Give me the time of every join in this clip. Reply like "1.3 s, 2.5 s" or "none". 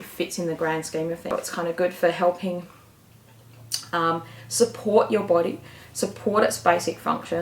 1.3 s